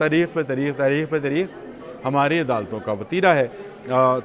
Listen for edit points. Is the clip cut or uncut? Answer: uncut